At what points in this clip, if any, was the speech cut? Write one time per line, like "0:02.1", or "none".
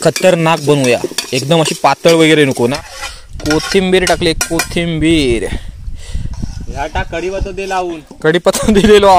0:02.5